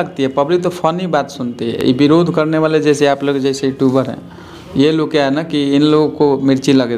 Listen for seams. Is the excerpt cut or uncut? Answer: uncut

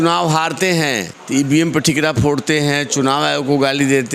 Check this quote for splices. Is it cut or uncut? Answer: cut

